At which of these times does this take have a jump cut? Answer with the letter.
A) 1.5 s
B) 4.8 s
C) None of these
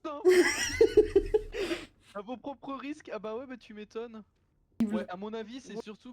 B